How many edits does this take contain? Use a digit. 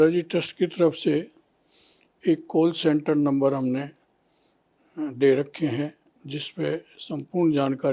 0